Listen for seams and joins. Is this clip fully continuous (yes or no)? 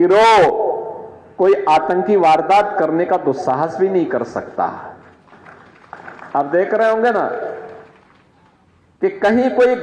yes